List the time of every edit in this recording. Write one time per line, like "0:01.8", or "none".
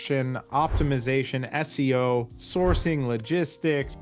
0:02.4